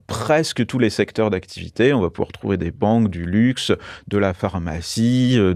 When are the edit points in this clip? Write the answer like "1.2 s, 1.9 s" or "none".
none